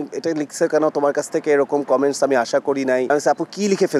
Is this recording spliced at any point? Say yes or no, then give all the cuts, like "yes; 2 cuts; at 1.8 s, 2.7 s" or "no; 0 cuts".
yes; 1 cut; at 3.1 s